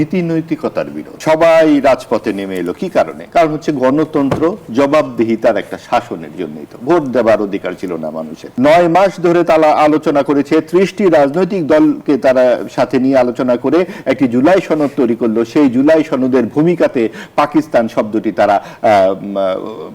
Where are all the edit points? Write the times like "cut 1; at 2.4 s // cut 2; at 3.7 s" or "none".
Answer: cut 1; at 1.1 s // cut 2; at 3.2 s // cut 3; at 8.4 s

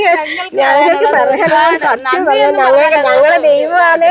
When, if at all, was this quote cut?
none

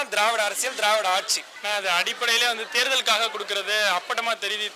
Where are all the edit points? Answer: none

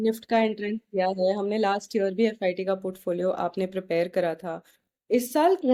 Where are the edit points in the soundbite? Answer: none

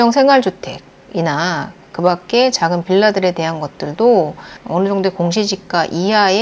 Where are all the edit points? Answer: cut 1; at 4.6 s

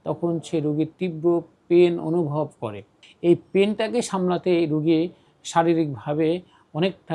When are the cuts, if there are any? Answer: none

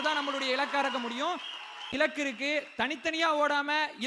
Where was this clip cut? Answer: cut 1; at 1.9 s

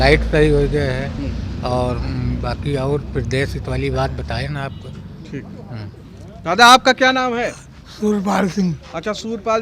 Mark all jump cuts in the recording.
none

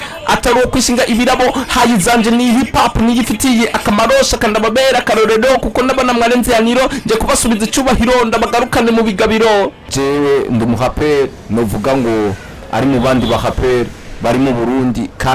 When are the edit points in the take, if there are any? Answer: cut 1; at 9.9 s

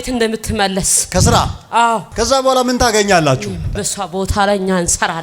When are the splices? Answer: cut 1; at 2.1 s // cut 2; at 3.7 s

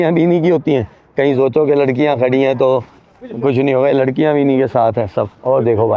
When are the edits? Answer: none

